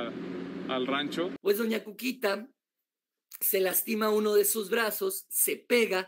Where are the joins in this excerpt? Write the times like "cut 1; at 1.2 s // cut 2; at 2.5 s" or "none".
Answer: cut 1; at 1.4 s